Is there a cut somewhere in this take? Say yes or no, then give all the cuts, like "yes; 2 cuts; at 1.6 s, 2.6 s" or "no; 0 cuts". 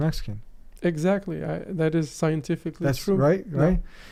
no; 0 cuts